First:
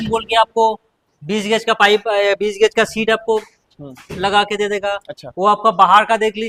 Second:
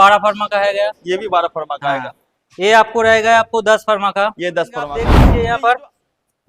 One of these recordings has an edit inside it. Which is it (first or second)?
second